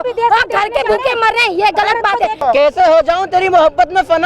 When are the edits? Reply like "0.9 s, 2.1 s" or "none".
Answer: 2.4 s

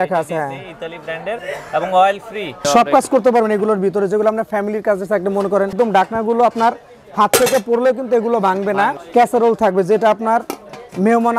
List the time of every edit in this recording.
2.7 s, 5.7 s, 9.0 s

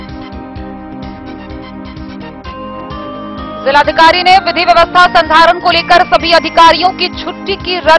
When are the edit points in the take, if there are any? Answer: 1.6 s, 3.6 s

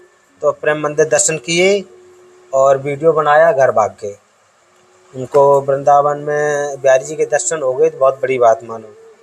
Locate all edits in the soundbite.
none

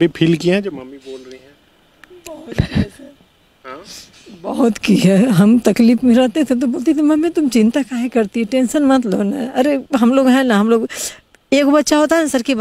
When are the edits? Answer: none

